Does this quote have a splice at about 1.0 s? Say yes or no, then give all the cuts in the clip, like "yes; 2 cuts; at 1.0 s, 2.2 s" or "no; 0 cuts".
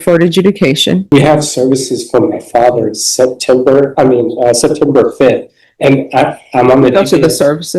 yes; 1 cut; at 1.0 s